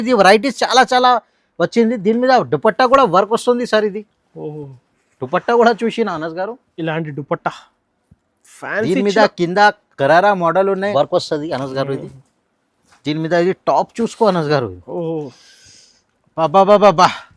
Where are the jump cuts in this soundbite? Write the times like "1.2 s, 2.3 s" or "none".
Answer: 10.9 s